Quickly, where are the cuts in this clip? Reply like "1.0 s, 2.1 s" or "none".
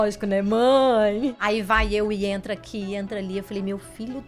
1.4 s